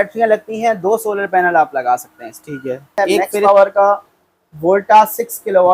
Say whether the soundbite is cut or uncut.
cut